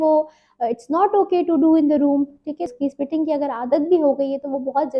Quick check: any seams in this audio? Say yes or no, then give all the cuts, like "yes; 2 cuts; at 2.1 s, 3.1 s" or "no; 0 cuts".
yes; 1 cut; at 2.7 s